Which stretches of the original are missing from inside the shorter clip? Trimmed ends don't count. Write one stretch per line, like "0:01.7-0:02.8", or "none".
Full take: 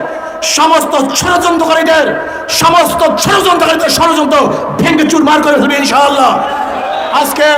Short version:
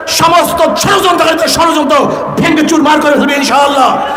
none